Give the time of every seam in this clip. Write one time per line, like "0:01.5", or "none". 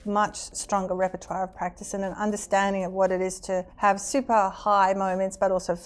0:03.7